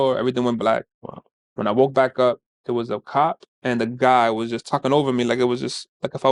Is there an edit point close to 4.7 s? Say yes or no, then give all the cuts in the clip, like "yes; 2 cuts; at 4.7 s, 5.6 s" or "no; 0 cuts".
no; 0 cuts